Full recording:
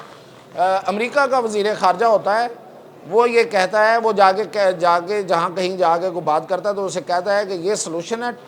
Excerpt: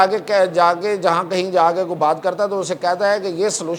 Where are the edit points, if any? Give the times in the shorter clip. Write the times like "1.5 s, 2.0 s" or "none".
none